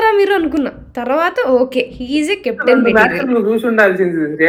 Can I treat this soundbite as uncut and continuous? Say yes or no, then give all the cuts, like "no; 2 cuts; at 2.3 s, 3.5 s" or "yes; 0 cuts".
yes; 0 cuts